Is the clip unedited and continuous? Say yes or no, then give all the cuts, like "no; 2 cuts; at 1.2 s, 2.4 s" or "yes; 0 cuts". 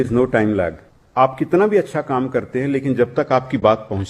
no; 1 cut; at 1.0 s